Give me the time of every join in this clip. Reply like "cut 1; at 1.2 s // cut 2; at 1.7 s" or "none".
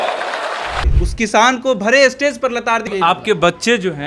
cut 1; at 1.0 s // cut 2; at 2.9 s